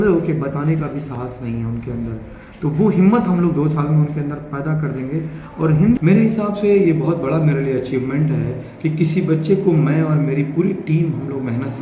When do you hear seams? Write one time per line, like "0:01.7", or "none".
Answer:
0:06.0